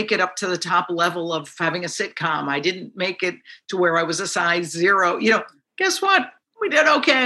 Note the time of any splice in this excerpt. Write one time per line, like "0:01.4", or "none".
none